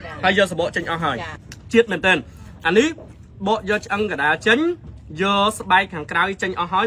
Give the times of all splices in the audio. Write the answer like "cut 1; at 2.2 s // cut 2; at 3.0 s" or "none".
cut 1; at 1.3 s